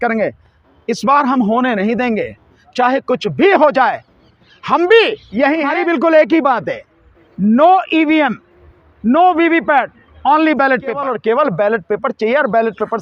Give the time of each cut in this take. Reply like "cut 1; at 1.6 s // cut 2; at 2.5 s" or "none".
cut 1; at 5.7 s // cut 2; at 11.1 s